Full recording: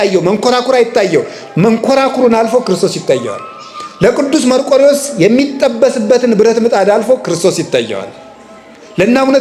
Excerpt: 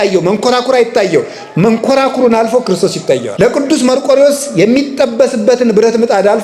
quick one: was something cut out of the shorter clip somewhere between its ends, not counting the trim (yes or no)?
yes